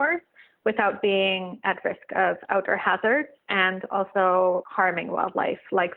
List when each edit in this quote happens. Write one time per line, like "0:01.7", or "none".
0:03.4
0:04.7